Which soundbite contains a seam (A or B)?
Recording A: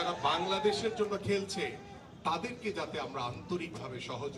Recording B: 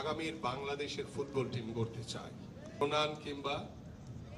B